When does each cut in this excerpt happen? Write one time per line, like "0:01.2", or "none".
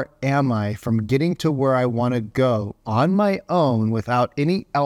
none